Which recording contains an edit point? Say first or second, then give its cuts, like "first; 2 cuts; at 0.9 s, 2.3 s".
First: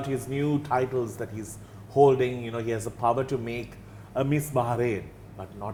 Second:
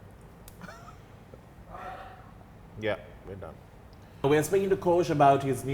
second; 1 cut; at 4.2 s